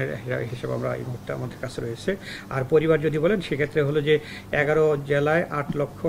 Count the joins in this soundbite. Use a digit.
0